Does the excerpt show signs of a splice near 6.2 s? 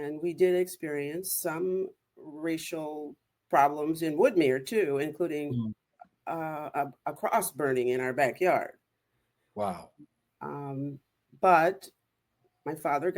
no; 0 cuts

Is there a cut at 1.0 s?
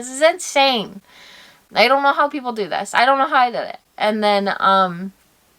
no; 0 cuts

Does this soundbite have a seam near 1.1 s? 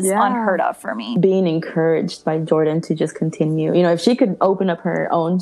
yes; 1 cut; at 1.1 s

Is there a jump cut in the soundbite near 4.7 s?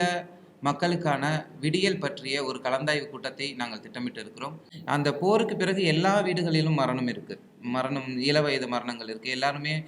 yes; 1 cut; at 4.7 s

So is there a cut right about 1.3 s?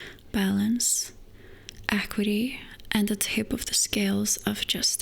no; 1 cut; at 2.7 s

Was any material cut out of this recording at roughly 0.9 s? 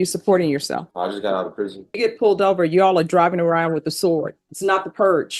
yes; 3 cuts; at 0.9 s, 2.0 s, 4.4 s

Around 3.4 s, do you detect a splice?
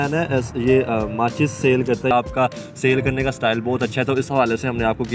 no; 1 cut; at 2.1 s

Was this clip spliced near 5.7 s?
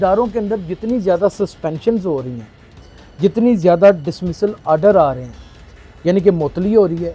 no; 0 cuts

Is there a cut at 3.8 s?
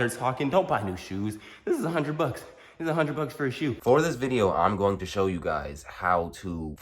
yes; 1 cut; at 3.8 s

